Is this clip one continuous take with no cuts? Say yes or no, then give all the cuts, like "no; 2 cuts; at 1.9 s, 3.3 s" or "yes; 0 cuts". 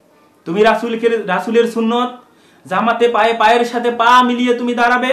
yes; 0 cuts